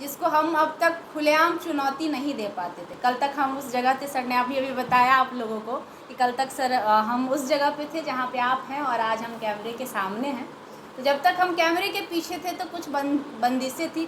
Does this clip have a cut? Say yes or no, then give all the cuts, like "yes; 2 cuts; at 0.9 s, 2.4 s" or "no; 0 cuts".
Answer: no; 0 cuts